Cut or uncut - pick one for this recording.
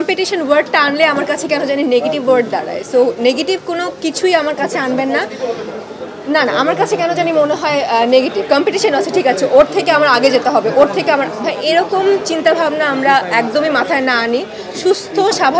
uncut